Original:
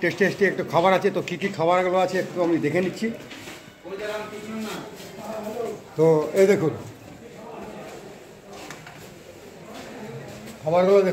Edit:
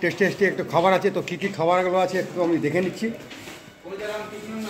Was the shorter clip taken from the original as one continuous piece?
yes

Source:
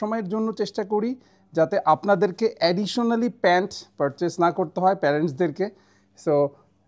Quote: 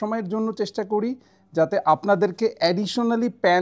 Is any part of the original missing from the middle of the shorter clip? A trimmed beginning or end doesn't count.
no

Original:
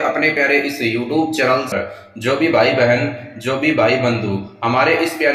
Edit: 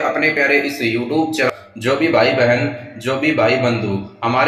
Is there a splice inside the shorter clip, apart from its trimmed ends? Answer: yes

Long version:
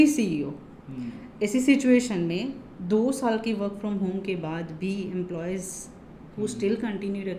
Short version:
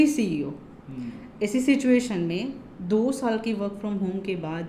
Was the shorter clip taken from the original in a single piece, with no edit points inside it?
yes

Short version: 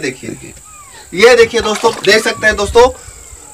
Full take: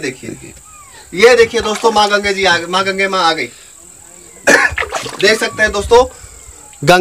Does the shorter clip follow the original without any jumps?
no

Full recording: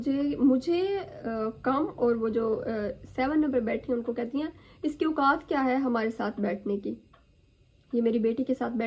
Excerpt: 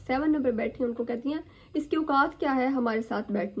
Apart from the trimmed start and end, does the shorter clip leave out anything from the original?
no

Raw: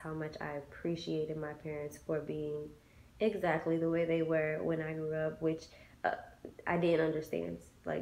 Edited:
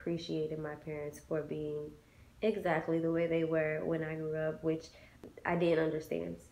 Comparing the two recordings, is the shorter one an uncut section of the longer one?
no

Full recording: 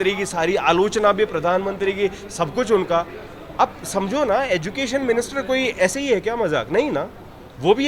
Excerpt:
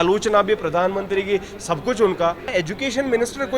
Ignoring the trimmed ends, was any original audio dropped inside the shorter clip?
yes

